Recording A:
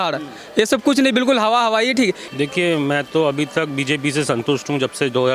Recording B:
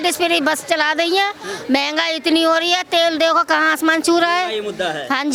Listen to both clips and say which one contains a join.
A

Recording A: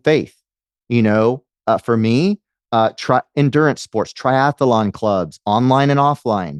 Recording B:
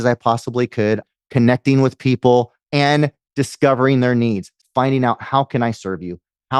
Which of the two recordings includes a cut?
B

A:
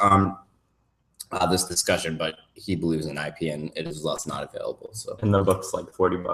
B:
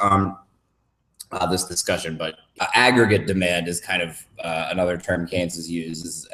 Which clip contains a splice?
A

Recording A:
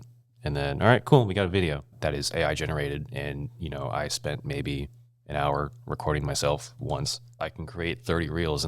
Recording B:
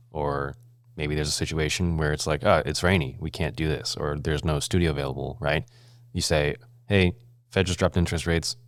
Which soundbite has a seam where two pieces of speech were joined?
A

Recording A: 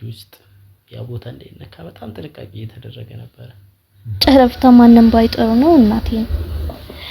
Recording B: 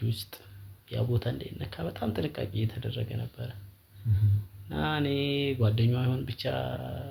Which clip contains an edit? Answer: A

